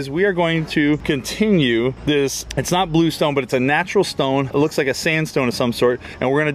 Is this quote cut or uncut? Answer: uncut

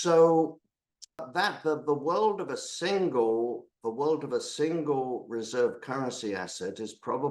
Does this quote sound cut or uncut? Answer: cut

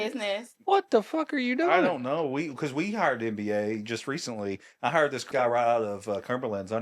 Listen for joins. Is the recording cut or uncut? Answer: cut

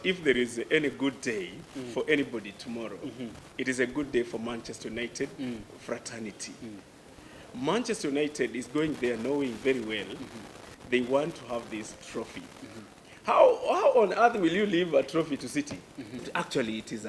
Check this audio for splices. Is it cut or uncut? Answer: cut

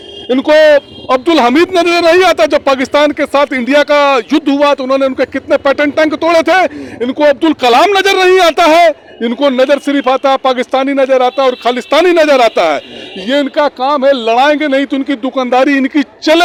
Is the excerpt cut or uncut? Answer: uncut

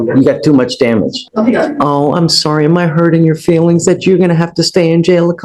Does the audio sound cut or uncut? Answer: cut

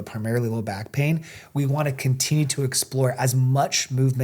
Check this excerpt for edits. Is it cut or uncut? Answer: uncut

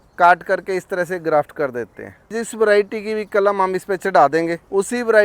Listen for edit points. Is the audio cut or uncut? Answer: cut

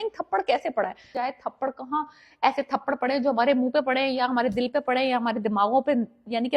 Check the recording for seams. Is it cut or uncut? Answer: cut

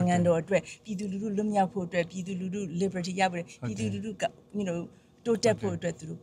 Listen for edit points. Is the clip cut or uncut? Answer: uncut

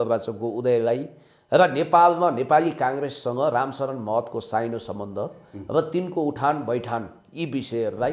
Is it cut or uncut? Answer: uncut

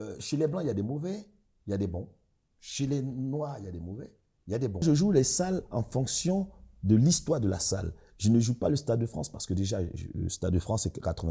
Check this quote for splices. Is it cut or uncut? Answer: cut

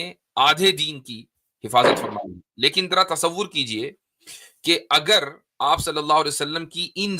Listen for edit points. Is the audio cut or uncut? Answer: uncut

